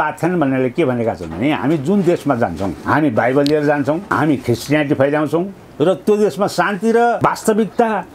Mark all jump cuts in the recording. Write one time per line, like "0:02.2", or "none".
0:02.8
0:04.0
0:07.2